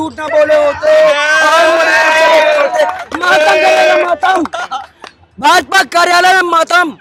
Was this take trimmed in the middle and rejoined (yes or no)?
no